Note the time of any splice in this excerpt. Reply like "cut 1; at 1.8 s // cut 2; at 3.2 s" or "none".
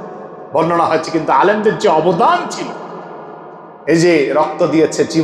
none

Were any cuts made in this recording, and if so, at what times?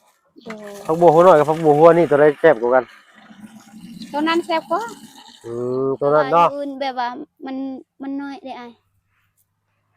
cut 1; at 6.7 s

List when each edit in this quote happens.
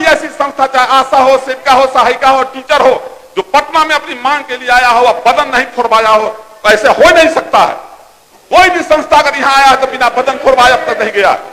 none

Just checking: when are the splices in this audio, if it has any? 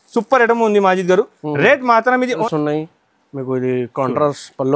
cut 1; at 2.4 s

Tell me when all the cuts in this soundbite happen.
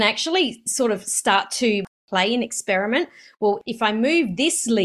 cut 1; at 1.8 s // cut 2; at 3.6 s

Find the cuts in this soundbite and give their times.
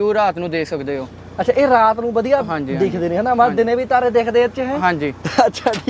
none

